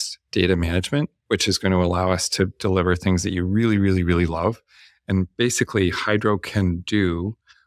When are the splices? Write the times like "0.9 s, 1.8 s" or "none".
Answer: none